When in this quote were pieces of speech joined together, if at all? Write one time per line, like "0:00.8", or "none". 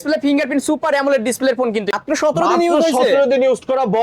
0:01.9